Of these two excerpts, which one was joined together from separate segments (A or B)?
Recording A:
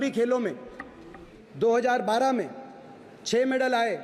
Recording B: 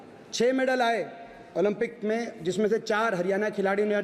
A